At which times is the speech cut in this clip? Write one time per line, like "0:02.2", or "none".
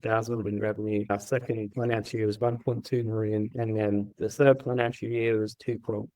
0:01.1
0:04.1